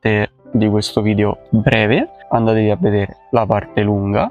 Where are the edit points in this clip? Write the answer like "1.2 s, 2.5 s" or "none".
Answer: 1.7 s